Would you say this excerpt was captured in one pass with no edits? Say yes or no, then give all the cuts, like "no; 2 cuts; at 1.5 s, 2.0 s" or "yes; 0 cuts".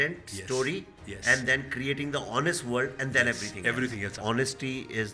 no; 1 cut; at 4.1 s